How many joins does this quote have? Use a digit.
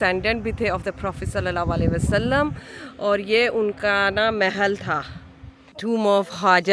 1